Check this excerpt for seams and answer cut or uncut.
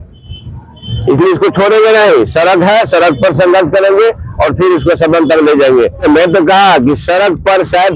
cut